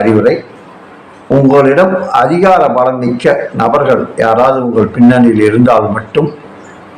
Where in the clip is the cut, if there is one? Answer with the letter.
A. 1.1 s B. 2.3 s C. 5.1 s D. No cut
D